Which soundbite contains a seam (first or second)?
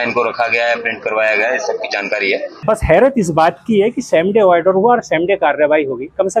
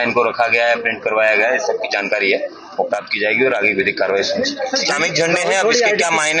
first